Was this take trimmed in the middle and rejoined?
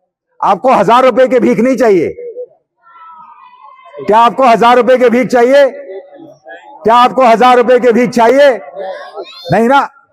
no; 0 cuts

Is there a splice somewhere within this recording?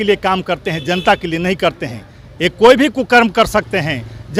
no; 0 cuts

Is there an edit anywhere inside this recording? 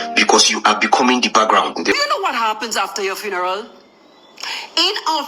yes; 1 cut; at 1.9 s

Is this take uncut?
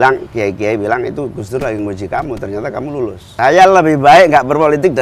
no; 1 cut; at 3.2 s

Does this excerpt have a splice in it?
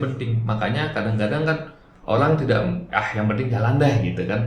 no; 0 cuts

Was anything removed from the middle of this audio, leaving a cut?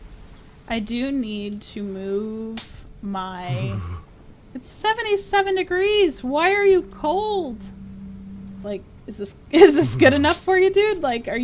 yes; 1 cut; at 8.6 s

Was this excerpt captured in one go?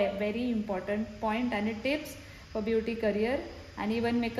yes; 0 cuts

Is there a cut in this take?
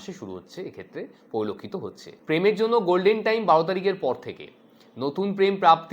yes; 1 cut; at 2.1 s

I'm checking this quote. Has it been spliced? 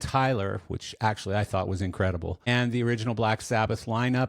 yes; 1 cut; at 2.5 s

